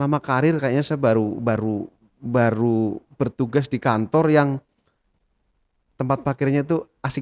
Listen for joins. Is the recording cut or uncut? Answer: uncut